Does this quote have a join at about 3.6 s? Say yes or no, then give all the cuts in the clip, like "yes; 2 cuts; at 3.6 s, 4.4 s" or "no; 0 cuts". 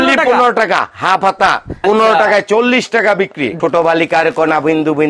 yes; 2 cuts; at 1.8 s, 3.6 s